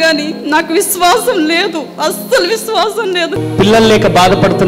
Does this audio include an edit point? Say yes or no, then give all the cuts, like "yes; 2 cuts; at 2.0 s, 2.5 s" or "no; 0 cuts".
yes; 1 cut; at 3.4 s